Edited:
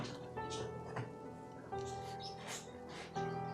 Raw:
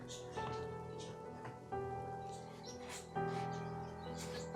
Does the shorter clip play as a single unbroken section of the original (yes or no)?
yes